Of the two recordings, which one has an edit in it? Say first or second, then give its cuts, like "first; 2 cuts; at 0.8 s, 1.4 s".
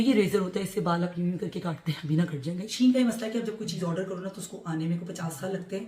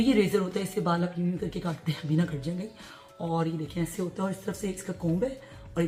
first; 1 cut; at 2.6 s